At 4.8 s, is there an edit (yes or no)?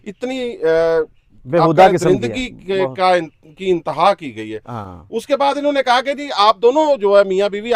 no